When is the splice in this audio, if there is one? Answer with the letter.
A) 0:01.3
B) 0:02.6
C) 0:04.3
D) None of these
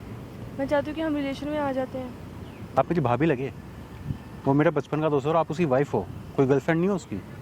B